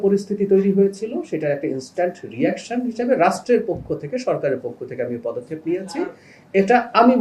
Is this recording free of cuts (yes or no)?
yes